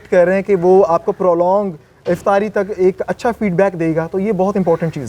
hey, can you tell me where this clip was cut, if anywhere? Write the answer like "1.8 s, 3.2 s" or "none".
none